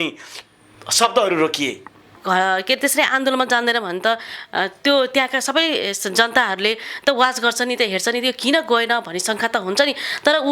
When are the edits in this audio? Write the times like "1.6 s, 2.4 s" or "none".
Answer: 2.1 s